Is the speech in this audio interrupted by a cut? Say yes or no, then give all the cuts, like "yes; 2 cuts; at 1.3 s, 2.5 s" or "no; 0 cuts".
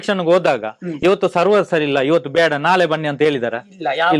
no; 0 cuts